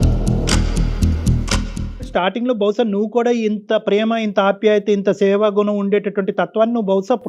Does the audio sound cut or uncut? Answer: uncut